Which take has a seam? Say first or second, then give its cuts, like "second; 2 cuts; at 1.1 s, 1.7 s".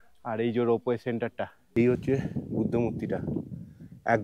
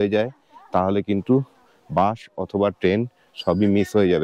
first; 1 cut; at 1.7 s